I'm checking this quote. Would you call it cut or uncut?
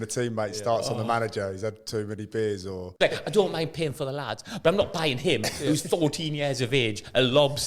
cut